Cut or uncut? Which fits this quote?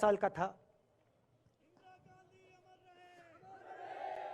uncut